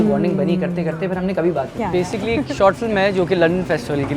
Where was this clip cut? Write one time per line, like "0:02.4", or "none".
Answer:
0:01.7